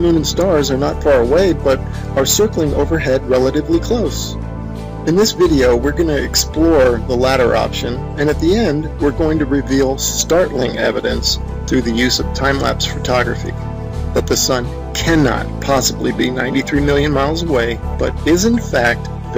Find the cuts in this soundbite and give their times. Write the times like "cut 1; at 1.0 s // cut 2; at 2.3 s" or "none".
cut 1; at 12.4 s